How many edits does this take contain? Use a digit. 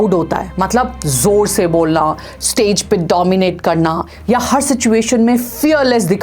0